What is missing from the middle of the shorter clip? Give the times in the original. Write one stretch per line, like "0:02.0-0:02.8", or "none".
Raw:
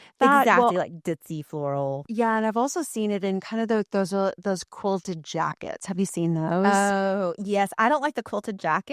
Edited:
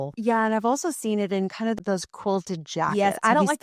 0:03.7-0:04.3
0:05.5-0:07.5